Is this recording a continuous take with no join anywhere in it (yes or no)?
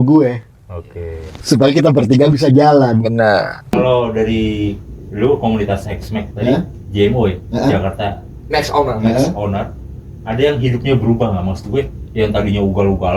no